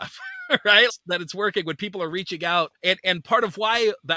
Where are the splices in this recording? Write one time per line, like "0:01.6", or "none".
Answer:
0:00.9